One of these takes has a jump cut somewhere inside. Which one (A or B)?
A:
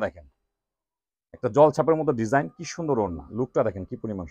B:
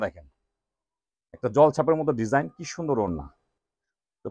A